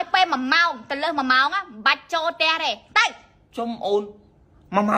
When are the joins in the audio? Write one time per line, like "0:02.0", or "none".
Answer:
none